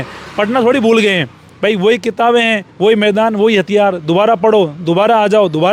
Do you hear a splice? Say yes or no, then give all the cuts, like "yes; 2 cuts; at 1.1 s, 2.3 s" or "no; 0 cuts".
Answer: no; 0 cuts